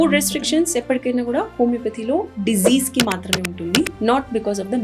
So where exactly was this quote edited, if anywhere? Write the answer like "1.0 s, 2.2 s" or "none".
3.9 s